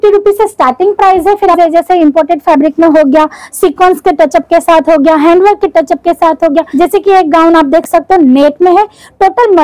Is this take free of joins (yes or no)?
no